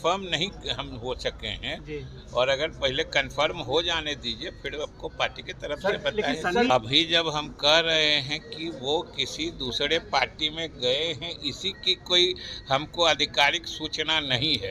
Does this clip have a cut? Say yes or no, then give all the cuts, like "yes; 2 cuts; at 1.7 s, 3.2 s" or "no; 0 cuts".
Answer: yes; 1 cut; at 6.7 s